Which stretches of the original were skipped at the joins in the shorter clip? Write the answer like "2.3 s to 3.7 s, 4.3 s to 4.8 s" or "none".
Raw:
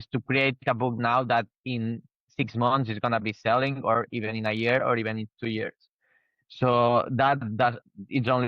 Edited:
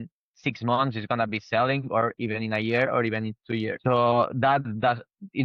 5.7 s to 6.5 s